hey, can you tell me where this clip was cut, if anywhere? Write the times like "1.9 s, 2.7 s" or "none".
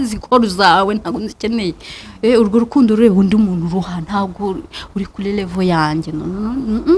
none